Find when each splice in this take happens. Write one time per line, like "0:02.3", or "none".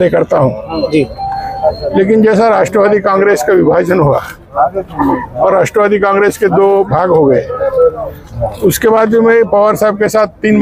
none